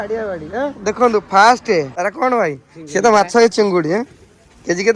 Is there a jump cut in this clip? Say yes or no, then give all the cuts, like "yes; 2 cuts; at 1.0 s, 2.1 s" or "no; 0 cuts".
yes; 1 cut; at 1.9 s